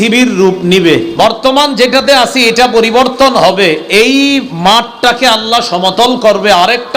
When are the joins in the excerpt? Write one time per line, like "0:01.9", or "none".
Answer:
0:01.1